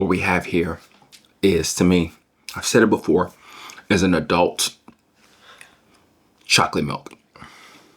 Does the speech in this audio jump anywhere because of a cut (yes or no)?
no